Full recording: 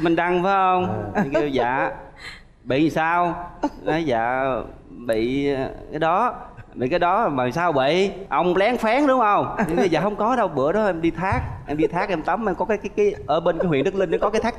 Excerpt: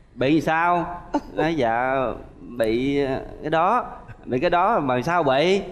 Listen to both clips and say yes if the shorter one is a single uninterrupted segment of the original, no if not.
yes